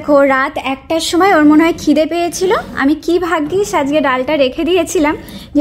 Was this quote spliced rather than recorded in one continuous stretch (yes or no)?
no